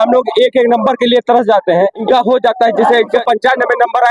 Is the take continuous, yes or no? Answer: no